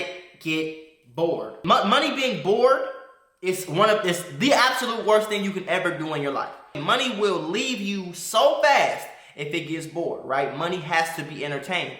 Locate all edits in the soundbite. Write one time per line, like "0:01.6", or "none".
0:01.6
0:06.8